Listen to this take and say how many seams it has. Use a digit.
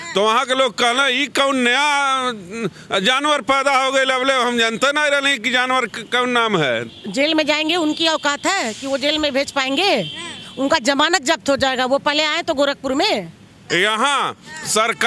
2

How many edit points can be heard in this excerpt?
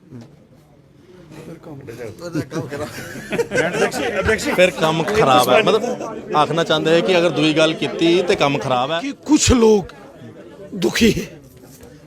1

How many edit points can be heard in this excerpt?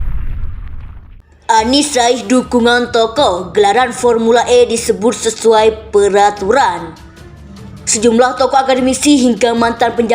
1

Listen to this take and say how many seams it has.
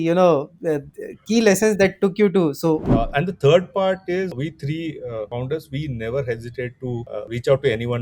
4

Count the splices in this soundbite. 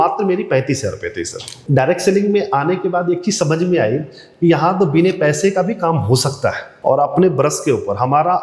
2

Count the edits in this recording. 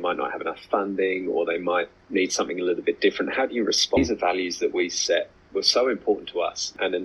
1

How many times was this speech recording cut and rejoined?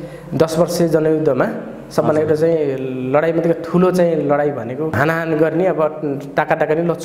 1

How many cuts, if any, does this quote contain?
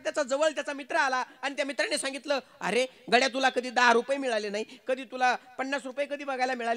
0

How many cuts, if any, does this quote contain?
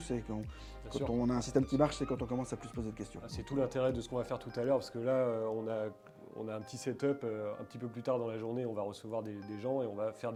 0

